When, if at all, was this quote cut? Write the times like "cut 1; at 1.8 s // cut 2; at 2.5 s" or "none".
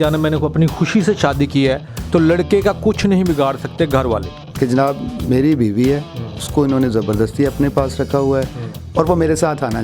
cut 1; at 4.4 s